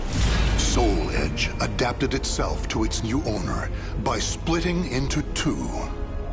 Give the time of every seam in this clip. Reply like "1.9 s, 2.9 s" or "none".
none